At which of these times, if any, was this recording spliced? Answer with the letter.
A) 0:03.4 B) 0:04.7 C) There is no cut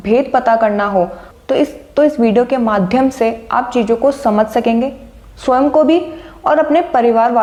C